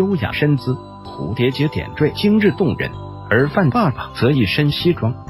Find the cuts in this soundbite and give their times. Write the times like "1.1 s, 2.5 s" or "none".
1.0 s